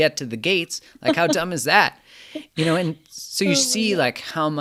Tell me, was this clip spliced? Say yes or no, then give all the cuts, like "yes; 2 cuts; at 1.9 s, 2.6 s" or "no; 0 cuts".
no; 0 cuts